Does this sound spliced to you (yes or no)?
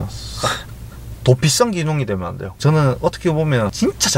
yes